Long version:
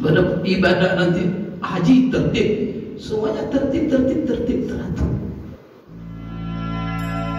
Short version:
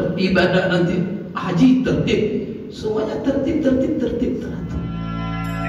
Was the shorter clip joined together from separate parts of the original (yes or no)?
yes